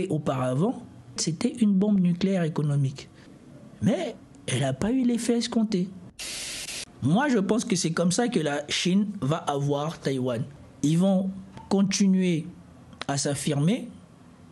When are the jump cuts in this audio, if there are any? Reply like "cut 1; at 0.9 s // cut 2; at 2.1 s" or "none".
cut 1; at 1.3 s // cut 2; at 6.6 s